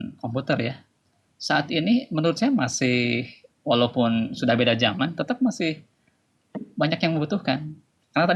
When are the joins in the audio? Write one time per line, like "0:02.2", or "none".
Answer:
none